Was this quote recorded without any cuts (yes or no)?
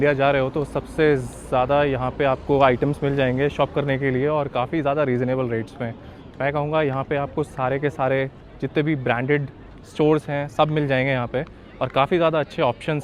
yes